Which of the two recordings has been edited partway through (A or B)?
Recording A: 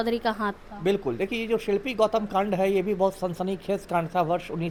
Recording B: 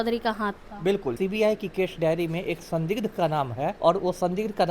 B